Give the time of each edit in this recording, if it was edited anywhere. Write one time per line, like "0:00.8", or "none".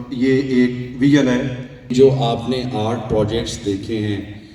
0:01.9